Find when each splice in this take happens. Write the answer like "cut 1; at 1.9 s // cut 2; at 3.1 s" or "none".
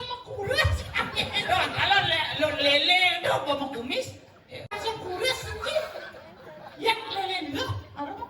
cut 1; at 4.7 s